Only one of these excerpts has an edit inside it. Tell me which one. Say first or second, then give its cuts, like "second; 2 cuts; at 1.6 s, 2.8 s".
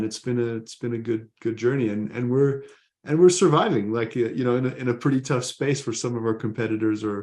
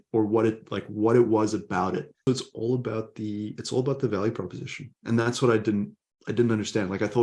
second; 1 cut; at 2.2 s